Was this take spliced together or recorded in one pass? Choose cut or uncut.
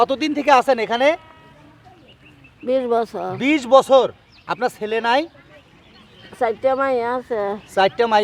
uncut